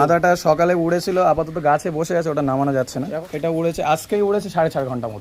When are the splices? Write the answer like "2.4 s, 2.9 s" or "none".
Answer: 3.2 s